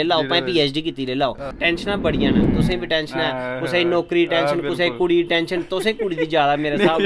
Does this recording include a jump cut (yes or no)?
yes